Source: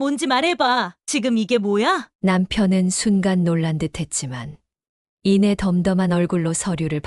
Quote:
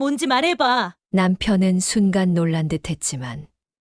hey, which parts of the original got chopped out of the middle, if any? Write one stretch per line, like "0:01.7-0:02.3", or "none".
0:01.0-0:02.1